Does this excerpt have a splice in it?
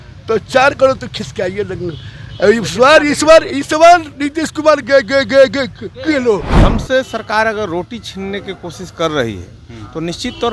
yes; 1 cut; at 6.6 s

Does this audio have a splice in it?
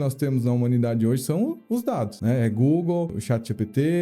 yes; 2 cuts; at 2.1 s, 3.2 s

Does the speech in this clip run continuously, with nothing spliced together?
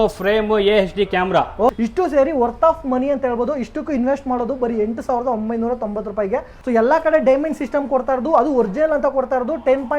no; 2 cuts; at 1.7 s, 6.5 s

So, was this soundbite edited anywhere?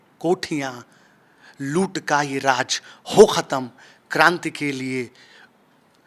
no; 0 cuts

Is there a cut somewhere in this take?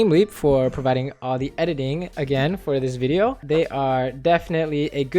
yes; 1 cut; at 3.4 s

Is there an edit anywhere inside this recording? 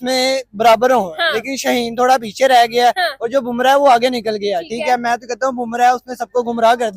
no; 0 cuts

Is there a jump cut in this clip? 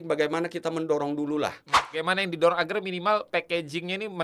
yes; 1 cut; at 2.0 s

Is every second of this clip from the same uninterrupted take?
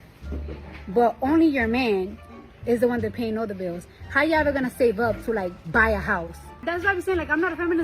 no; 1 cut; at 6.6 s

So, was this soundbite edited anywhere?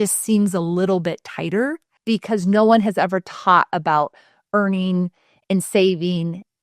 yes; 1 cut; at 1.9 s

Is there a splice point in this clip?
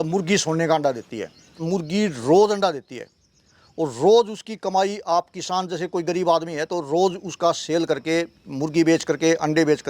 yes; 1 cut; at 1.6 s

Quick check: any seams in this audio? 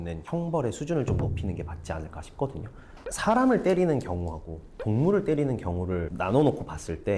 yes; 1 cut; at 2.7 s

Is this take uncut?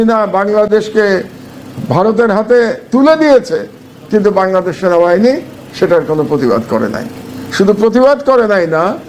yes; 0 cuts

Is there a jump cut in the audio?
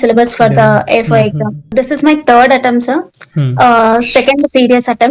yes; 1 cut; at 1.7 s

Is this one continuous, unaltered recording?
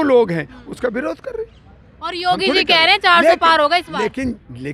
yes; 0 cuts

